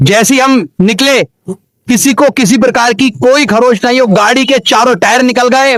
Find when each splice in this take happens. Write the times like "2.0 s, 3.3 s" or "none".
none